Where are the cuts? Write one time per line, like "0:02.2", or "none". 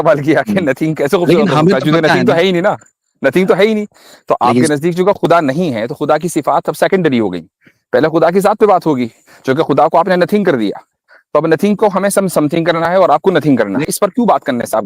0:13.8

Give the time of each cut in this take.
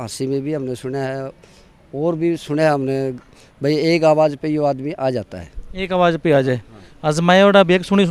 none

